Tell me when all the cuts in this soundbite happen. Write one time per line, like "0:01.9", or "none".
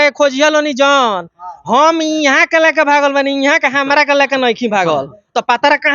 none